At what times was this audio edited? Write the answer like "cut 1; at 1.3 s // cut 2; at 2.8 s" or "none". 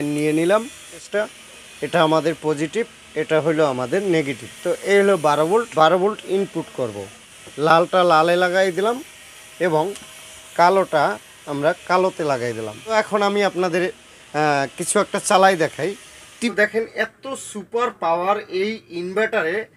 cut 1; at 1.0 s // cut 2; at 5.7 s // cut 3; at 7.1 s // cut 4; at 12.9 s // cut 5; at 16.5 s